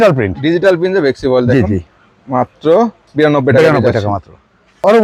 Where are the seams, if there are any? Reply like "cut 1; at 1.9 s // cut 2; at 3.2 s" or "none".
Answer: none